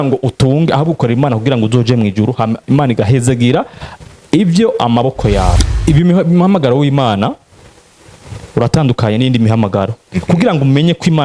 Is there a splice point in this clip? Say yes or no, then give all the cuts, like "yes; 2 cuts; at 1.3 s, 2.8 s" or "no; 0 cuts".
yes; 1 cut; at 5.6 s